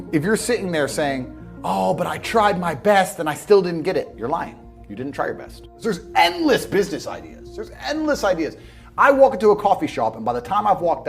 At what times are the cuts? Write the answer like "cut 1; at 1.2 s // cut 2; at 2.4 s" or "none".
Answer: cut 1; at 5.7 s